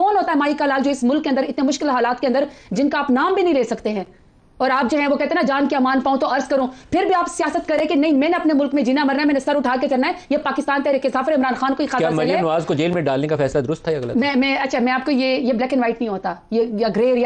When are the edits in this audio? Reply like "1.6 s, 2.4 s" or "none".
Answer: none